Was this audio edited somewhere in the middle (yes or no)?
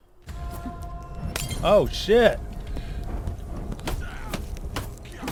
no